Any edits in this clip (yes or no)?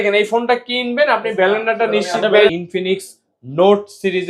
yes